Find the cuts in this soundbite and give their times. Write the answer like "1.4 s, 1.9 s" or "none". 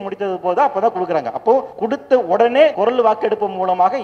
1.7 s, 2.8 s